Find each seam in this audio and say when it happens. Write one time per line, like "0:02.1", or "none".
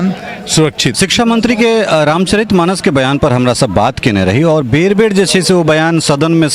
0:01.0